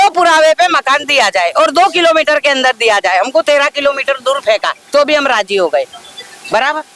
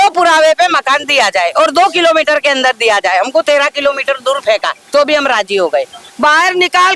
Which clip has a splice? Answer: second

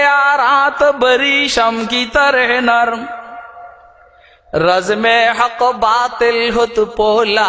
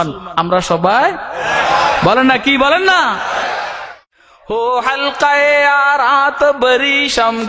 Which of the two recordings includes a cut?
second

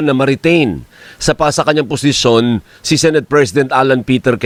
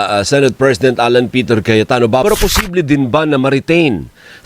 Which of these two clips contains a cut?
second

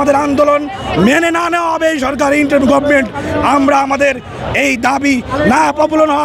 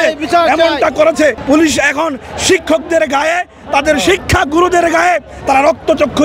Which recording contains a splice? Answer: second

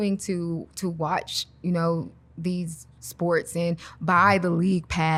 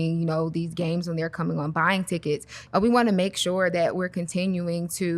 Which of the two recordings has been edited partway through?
second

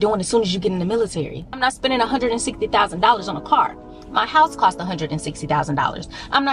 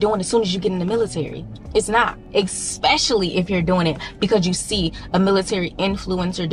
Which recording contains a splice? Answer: first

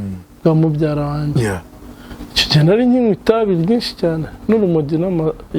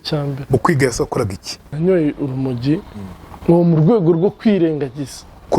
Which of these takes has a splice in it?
second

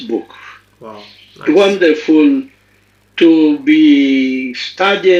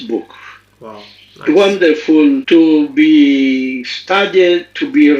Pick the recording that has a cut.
second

